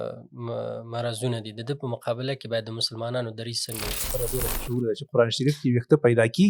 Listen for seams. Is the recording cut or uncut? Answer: cut